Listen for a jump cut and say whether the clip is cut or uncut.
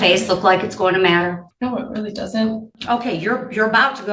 cut